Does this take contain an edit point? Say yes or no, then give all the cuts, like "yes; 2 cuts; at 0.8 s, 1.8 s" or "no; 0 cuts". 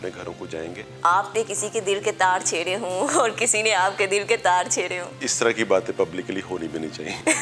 yes; 2 cuts; at 0.9 s, 5.2 s